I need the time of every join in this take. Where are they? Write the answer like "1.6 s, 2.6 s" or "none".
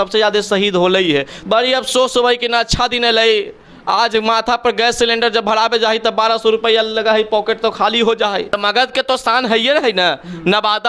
1.3 s, 8.6 s